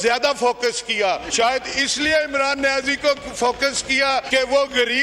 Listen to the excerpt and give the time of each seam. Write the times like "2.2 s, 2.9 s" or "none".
1.3 s, 4.3 s